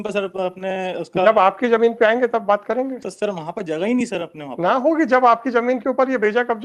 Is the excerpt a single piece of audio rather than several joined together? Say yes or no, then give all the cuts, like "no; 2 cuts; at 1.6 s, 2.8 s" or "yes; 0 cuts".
yes; 0 cuts